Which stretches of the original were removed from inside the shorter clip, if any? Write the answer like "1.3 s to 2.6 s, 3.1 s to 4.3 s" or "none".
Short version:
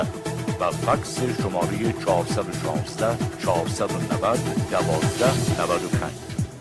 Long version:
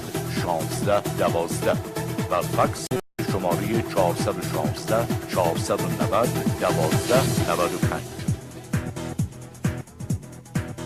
3.0 s to 3.2 s